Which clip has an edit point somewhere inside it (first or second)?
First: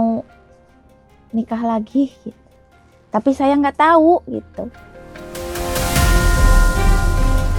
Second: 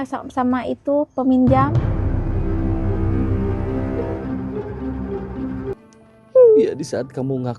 second